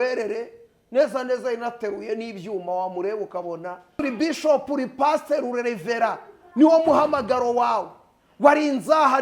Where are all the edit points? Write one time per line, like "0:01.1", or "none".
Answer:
0:04.0